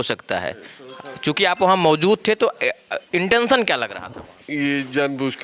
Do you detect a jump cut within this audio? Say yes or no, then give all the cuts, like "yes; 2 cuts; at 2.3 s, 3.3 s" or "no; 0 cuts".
no; 0 cuts